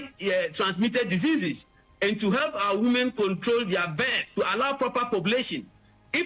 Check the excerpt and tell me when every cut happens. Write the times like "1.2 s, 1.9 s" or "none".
4.2 s